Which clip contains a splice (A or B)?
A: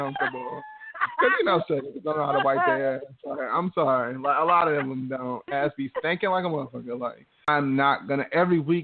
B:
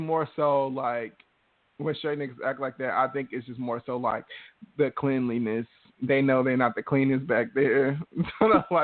A